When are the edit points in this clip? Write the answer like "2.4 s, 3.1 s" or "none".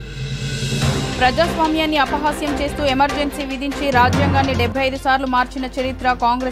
1.0 s